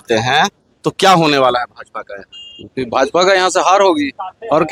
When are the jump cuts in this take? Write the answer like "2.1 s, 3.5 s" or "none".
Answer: none